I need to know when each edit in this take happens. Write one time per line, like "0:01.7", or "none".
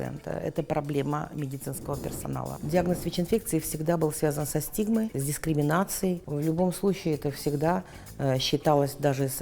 0:02.5
0:05.2
0:06.3